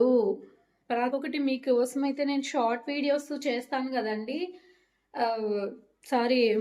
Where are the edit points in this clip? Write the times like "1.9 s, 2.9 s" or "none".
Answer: 1.1 s